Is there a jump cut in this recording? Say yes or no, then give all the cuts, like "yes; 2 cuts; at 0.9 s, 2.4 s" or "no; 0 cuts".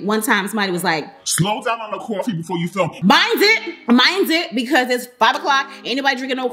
no; 0 cuts